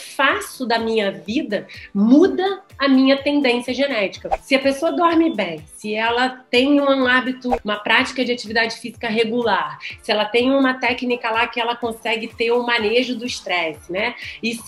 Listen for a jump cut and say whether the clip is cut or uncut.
cut